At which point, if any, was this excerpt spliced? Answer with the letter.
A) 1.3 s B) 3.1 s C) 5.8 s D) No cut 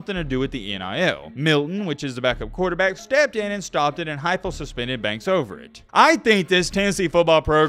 C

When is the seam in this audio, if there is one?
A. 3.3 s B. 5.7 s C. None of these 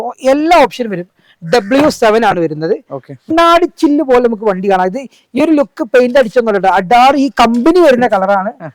A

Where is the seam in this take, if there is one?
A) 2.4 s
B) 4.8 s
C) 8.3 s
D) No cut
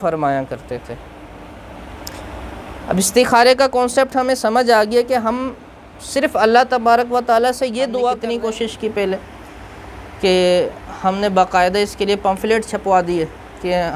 C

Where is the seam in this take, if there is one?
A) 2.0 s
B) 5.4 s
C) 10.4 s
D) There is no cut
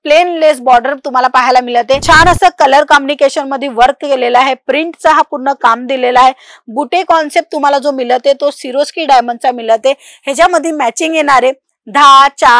A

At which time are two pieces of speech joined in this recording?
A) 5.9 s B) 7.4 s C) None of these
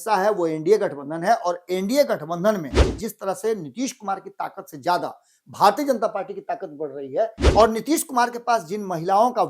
B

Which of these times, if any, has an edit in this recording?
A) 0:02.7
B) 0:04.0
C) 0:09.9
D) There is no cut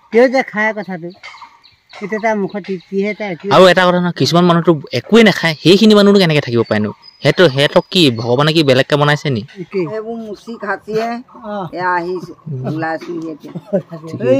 C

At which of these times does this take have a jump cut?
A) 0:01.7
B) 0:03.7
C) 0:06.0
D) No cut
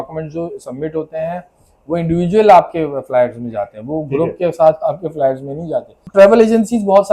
C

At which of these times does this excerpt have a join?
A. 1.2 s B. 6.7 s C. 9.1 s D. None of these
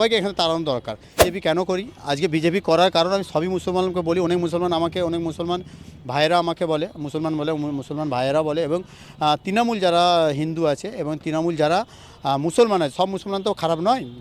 A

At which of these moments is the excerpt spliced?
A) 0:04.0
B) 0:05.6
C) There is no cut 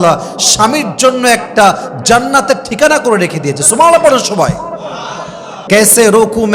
B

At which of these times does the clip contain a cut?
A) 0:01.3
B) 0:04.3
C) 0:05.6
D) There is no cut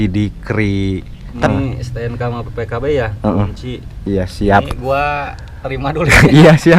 A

